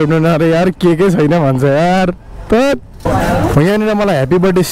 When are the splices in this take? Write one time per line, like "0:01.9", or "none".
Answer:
0:03.0